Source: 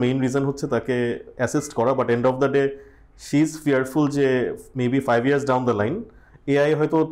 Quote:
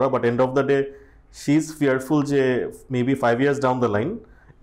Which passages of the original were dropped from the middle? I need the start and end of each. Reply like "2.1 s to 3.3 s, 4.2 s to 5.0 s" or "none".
none